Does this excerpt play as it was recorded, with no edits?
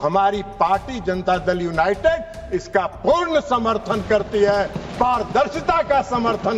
yes; 0 cuts

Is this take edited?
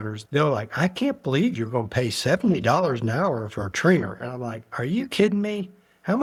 no; 0 cuts

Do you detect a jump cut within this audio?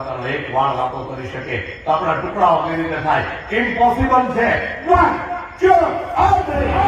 no; 0 cuts

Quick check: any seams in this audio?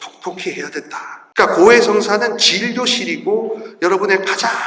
yes; 1 cut; at 1.2 s

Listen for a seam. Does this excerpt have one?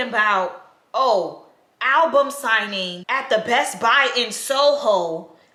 no; 0 cuts

